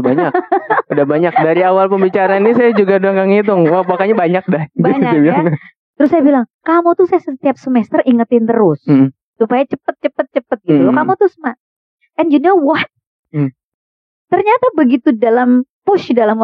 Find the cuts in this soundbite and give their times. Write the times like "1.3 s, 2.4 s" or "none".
5.8 s